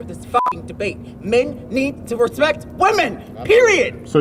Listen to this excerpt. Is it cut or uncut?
uncut